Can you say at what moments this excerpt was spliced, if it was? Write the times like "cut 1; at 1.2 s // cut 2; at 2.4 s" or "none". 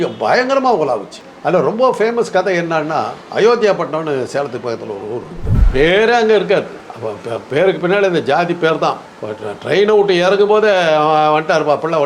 cut 1; at 5.5 s

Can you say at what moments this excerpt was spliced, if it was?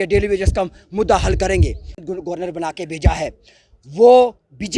cut 1; at 2.0 s

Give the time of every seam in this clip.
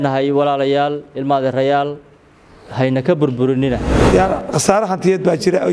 cut 1; at 3.9 s

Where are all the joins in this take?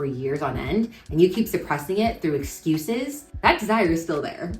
cut 1; at 3.3 s

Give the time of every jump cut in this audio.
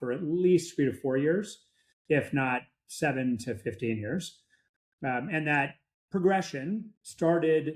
none

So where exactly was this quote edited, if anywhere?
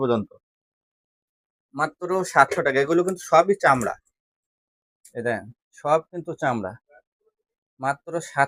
none

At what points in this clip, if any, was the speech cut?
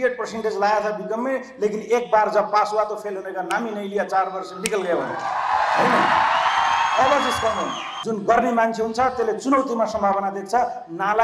cut 1; at 8.0 s

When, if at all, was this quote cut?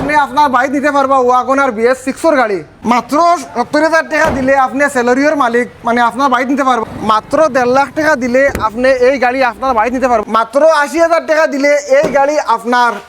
cut 1; at 2.7 s // cut 2; at 6.8 s // cut 3; at 10.2 s

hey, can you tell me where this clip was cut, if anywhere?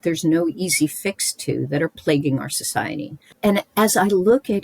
cut 1; at 3.2 s

